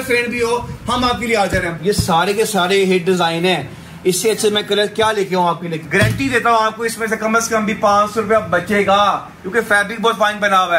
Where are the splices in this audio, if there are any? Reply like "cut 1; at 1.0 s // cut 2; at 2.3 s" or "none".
cut 1; at 1.8 s // cut 2; at 5.7 s